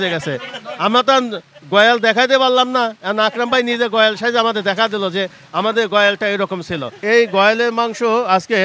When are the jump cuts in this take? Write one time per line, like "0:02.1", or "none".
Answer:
0:07.0